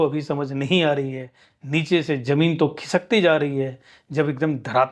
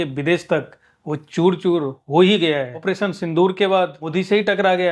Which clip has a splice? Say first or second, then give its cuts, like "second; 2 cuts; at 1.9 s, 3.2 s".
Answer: second; 2 cuts; at 2.7 s, 4.0 s